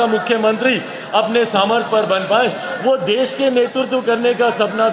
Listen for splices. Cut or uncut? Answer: uncut